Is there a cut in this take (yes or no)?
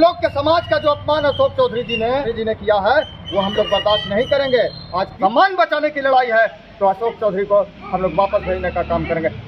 yes